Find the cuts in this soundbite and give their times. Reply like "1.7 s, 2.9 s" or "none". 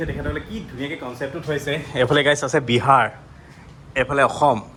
none